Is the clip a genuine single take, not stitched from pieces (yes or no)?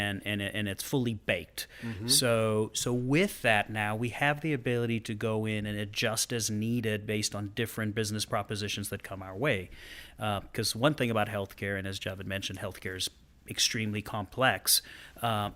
yes